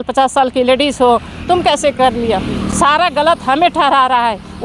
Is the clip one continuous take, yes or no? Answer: yes